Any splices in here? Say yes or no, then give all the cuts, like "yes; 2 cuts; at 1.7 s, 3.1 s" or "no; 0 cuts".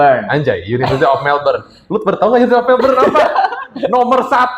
no; 0 cuts